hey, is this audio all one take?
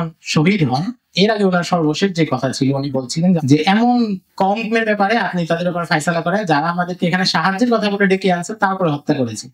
no; 2 cuts; at 3.4 s, 4.2 s

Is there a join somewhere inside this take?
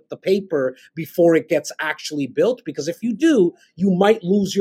no; 0 cuts

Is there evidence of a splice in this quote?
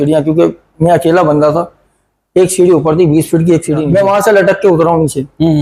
yes; 1 cut; at 3.8 s

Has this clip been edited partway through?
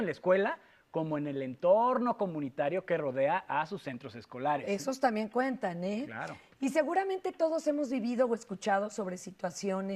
no; 0 cuts

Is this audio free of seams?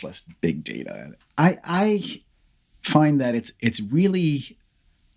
yes; 0 cuts

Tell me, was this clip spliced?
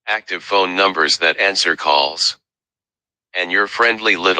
yes; 1 cut; at 1.1 s

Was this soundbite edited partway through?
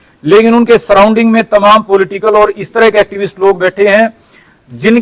no; 0 cuts

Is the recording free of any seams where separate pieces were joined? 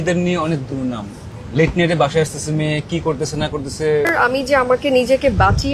no; 2 cuts; at 1.3 s, 4.1 s

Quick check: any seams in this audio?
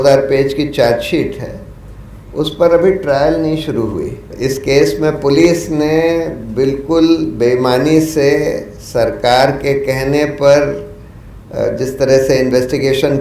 yes; 1 cut; at 4.3 s

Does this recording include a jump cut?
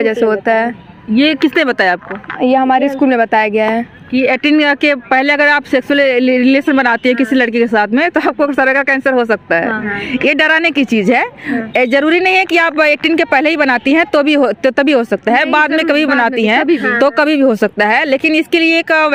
no; 0 cuts

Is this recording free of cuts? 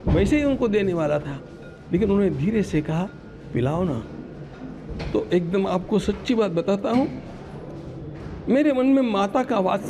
yes; 0 cuts

